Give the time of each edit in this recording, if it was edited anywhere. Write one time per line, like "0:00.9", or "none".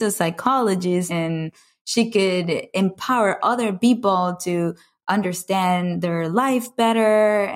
0:01.1

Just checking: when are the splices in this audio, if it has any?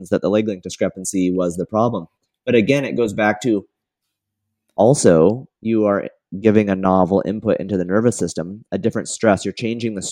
none

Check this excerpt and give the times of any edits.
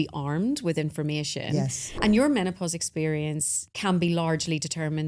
0:01.8
0:03.6

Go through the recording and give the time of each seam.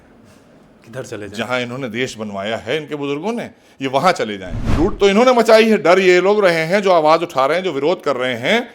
0:04.6

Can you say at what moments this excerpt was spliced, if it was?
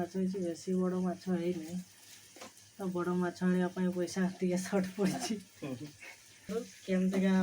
0:06.5

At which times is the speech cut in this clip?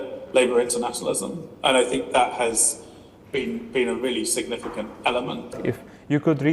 0:05.5

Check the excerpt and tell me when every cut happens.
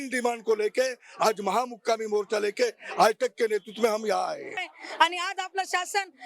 0:04.6

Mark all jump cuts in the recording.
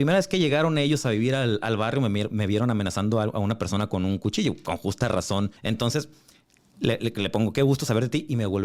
0:05.6

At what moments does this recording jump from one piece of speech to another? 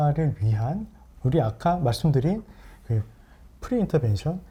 none

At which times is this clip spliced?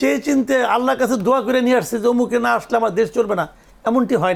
none

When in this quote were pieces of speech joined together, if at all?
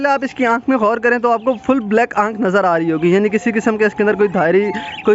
none

